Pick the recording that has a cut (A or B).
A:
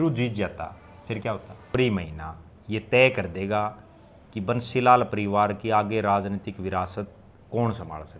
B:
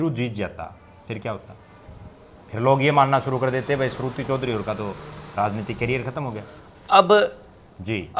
A